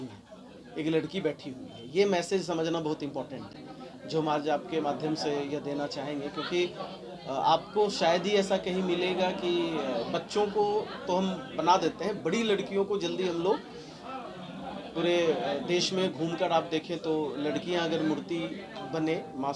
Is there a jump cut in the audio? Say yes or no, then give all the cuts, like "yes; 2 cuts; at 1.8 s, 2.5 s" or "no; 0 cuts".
no; 0 cuts